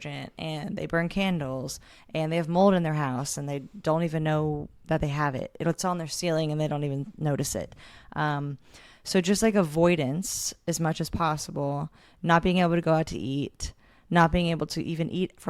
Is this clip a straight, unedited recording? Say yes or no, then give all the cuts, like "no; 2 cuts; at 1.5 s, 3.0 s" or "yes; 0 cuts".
yes; 0 cuts